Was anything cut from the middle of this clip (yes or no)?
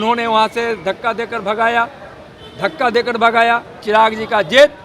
yes